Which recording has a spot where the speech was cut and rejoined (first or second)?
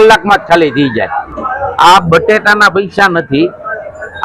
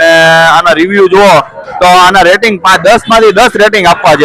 first